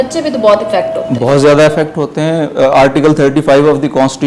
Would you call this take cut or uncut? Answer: uncut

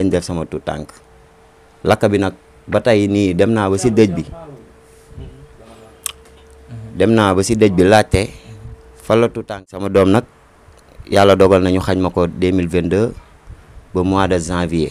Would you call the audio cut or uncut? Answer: cut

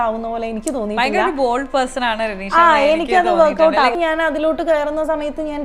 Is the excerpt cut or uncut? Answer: cut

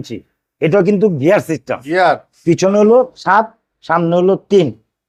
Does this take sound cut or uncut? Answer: uncut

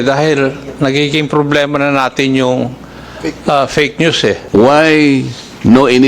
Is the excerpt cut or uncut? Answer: cut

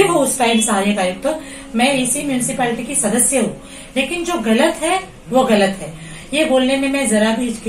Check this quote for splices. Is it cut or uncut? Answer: uncut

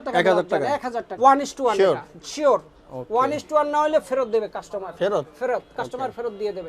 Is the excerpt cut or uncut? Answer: cut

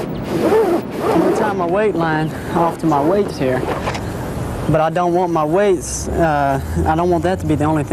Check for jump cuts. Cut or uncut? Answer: uncut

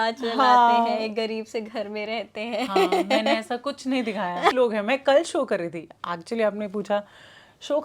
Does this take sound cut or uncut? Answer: cut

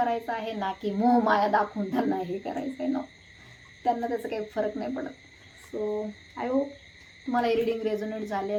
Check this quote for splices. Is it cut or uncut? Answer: uncut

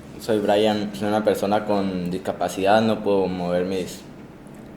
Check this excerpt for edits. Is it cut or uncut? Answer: cut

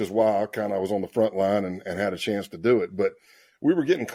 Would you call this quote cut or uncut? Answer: uncut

